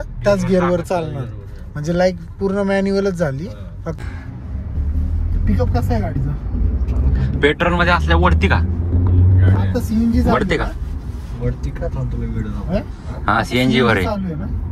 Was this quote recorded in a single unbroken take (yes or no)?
no